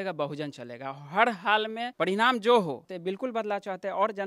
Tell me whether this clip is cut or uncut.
cut